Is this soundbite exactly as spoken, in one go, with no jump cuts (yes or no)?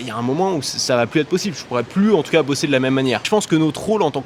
no